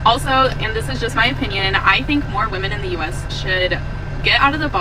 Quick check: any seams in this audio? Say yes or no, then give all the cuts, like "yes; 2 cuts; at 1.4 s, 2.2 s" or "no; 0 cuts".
no; 0 cuts